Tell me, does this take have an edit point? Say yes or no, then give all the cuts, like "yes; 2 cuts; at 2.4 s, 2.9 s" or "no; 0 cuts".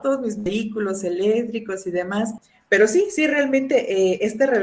yes; 1 cut; at 2.5 s